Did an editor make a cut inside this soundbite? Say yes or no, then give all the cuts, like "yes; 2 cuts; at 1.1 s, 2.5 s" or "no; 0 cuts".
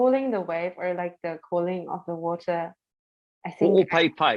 no; 0 cuts